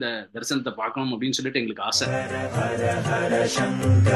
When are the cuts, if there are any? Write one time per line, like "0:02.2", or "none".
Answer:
0:02.0